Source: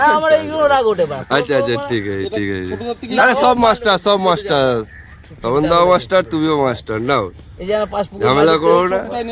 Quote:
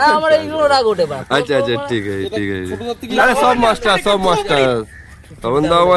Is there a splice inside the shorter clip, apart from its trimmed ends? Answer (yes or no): no